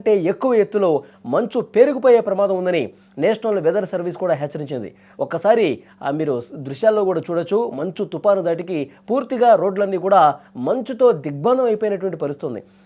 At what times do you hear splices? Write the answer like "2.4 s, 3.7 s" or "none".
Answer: none